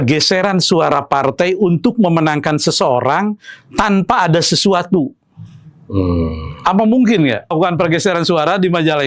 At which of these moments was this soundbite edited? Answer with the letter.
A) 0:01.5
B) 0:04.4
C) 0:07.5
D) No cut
C